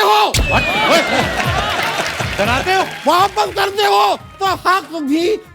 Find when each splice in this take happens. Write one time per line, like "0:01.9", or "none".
0:02.9